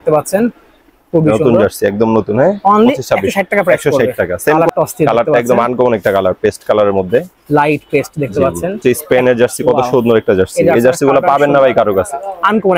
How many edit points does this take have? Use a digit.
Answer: 2